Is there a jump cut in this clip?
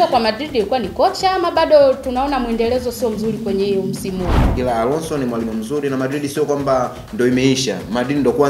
yes; 1 cut; at 4.4 s

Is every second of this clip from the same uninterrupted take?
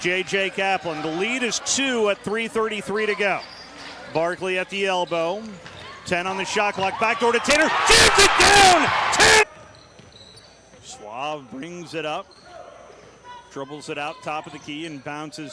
yes; 0 cuts

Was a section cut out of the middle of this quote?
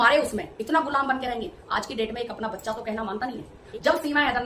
yes; 1 cut; at 3.5 s

